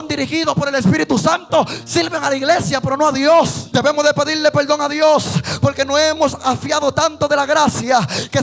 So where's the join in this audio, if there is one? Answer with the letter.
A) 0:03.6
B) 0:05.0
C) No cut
A